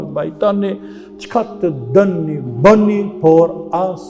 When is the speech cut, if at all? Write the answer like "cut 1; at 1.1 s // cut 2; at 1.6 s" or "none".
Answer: none